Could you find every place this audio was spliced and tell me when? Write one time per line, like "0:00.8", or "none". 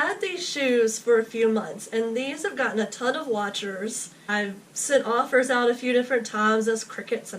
0:04.1